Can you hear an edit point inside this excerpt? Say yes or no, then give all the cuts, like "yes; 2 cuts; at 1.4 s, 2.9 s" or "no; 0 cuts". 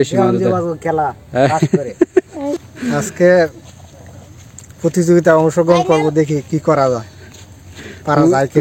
yes; 1 cut; at 2.6 s